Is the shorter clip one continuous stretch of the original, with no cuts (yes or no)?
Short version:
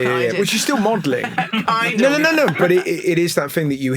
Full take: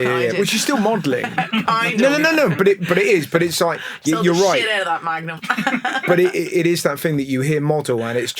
no